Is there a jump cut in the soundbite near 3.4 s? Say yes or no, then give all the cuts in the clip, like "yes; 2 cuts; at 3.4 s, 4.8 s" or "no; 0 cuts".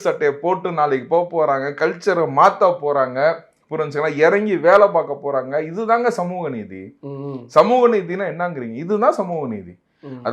no; 0 cuts